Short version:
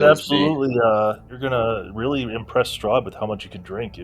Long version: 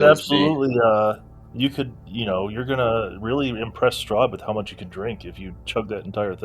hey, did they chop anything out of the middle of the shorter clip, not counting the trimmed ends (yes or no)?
yes